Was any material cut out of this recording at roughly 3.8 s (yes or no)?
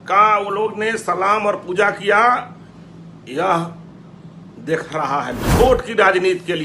no